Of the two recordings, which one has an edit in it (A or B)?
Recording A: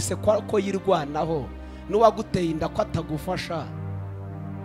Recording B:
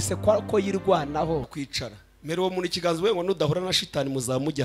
B